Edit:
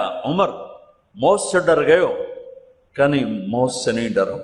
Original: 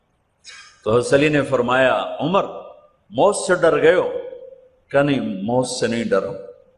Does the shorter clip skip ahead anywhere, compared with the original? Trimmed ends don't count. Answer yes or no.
no